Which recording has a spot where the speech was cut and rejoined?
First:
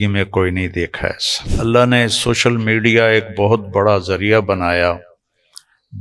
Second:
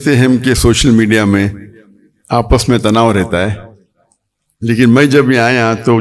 first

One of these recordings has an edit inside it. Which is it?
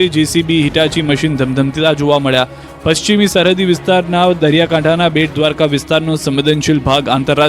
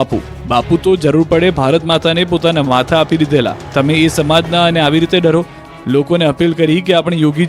first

